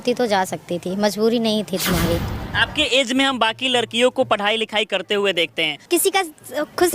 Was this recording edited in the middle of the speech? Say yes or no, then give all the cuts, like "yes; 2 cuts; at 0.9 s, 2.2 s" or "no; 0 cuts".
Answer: yes; 2 cuts; at 2.3 s, 5.7 s